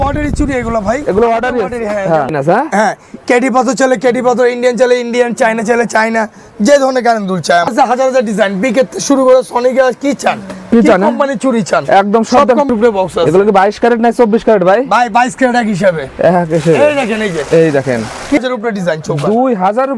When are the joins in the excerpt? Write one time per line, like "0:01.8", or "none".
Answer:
0:02.3
0:07.7
0:12.7
0:18.4